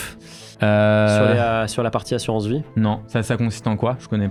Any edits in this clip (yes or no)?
no